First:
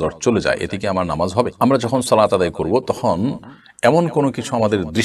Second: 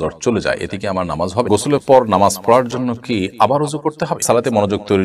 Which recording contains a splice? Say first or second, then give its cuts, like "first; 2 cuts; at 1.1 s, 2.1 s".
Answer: second; 2 cuts; at 1.5 s, 4.2 s